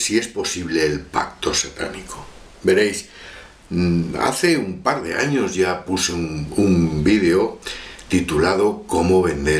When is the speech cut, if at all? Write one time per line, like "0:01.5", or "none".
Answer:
0:06.8